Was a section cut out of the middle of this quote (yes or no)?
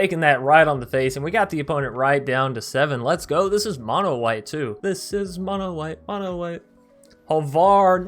yes